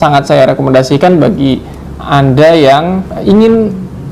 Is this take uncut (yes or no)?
no